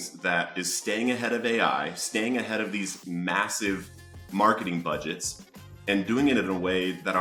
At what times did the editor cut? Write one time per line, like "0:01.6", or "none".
none

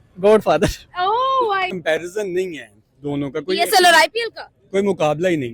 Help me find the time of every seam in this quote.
0:01.7

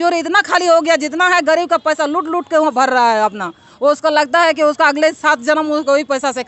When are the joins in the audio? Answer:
none

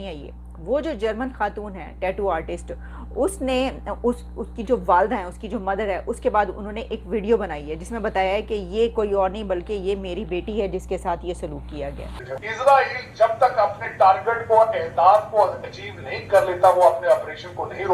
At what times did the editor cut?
0:12.2

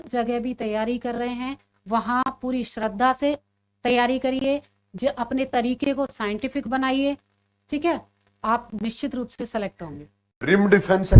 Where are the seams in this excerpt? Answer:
0:10.2

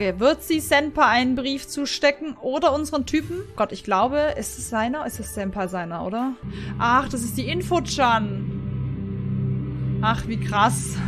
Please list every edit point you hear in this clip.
0:03.5
0:06.4

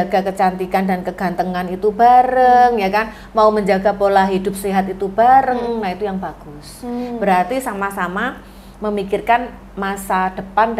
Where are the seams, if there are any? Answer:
none

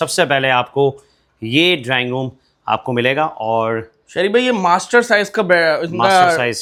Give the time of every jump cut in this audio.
none

